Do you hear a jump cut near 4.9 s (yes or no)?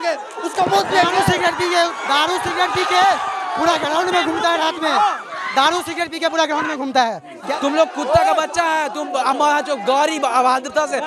no